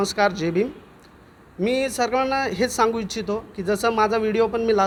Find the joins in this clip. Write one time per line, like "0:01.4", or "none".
none